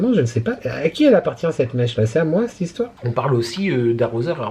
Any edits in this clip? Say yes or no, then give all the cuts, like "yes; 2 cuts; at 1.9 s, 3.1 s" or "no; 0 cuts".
yes; 1 cut; at 3.0 s